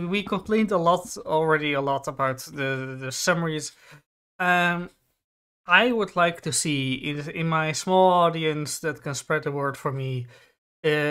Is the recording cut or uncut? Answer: uncut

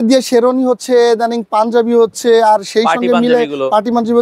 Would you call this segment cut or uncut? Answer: uncut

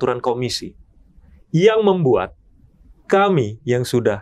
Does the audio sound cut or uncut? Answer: uncut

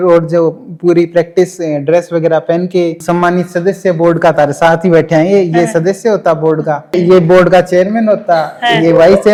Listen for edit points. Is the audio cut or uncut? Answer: uncut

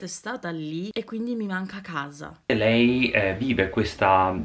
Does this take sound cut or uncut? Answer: uncut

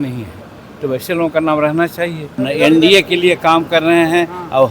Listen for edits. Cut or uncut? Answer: cut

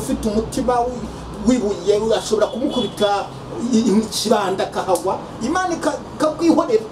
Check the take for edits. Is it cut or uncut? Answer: uncut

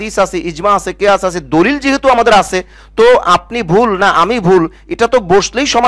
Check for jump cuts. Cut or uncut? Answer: uncut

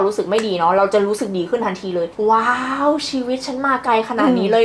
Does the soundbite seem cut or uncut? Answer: cut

